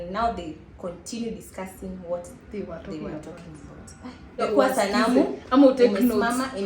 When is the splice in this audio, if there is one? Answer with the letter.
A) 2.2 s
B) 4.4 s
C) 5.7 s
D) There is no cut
B